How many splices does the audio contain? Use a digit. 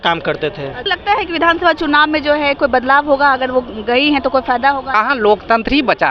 2